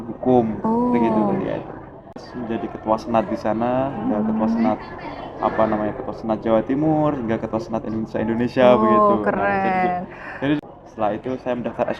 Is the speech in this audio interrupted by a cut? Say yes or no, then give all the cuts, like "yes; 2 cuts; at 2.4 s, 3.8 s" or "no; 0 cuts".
yes; 2 cuts; at 2.3 s, 10.6 s